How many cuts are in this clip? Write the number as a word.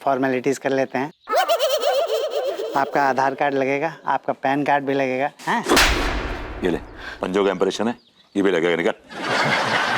one